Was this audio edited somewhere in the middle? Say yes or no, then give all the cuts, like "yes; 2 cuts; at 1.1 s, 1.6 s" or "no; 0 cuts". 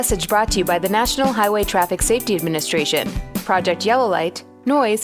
no; 0 cuts